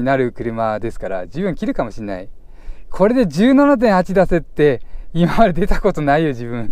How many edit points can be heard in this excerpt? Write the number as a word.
zero